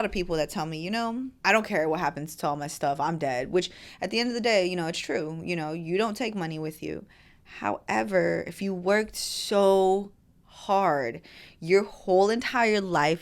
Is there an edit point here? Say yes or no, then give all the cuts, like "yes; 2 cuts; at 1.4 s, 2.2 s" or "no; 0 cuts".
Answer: yes; 1 cut; at 1.3 s